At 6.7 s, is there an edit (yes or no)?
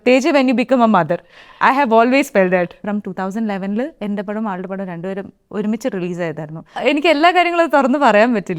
yes